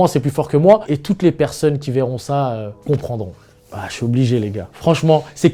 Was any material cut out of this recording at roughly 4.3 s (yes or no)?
no